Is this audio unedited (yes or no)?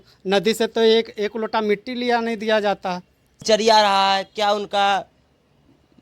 no